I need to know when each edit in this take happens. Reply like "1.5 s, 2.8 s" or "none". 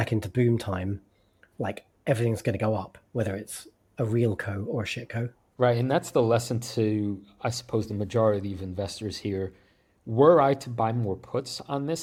none